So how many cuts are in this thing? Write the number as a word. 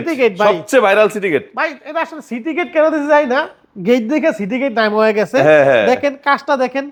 zero